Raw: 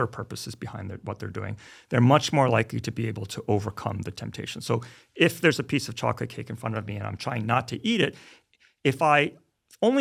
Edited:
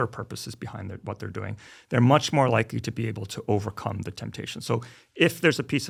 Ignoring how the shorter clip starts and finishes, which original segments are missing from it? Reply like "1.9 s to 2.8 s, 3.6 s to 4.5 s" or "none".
none